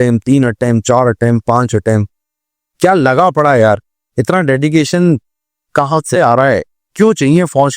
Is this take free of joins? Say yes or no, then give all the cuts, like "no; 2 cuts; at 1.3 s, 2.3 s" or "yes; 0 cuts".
yes; 0 cuts